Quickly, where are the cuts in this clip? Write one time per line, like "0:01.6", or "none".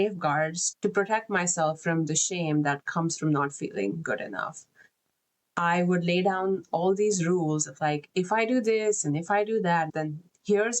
0:09.9